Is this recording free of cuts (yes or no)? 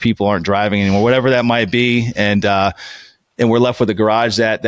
yes